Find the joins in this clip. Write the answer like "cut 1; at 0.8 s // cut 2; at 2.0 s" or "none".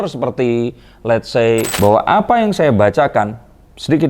cut 1; at 1.7 s